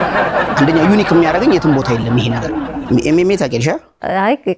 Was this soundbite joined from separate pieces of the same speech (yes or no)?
yes